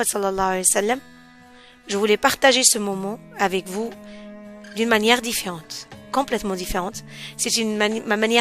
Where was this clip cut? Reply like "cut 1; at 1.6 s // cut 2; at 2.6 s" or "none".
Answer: none